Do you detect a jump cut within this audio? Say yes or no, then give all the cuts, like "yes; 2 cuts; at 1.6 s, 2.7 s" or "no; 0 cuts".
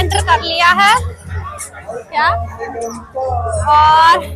no; 0 cuts